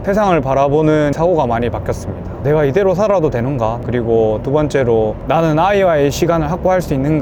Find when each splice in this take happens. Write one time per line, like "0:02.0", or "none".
0:02.4
0:03.8